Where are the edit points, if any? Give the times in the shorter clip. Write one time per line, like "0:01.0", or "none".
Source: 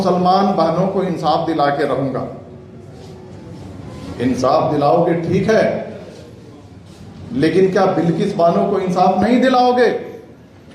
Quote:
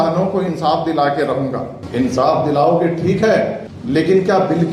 0:01.8
0:03.7